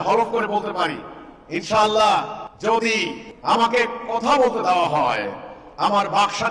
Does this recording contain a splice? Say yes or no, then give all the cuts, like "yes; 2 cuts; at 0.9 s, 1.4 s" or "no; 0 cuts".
yes; 2 cuts; at 2.4 s, 3.2 s